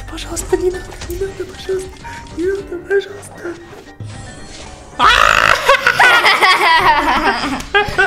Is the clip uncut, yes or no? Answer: yes